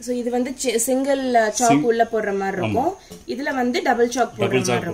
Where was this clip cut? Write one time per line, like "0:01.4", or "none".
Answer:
none